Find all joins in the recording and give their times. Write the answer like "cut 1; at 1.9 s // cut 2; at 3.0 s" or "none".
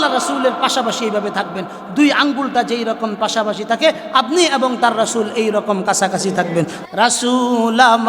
cut 1; at 6.8 s